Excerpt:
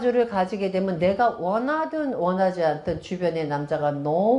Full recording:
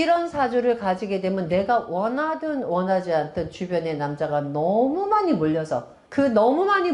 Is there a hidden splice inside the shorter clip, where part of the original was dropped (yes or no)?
no